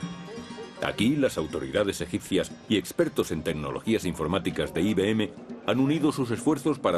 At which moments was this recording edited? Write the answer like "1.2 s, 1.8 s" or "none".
2.5 s